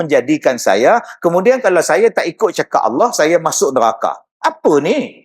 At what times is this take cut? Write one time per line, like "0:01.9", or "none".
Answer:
0:04.3